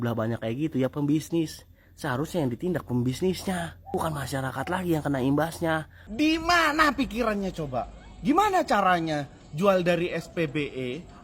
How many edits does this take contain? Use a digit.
1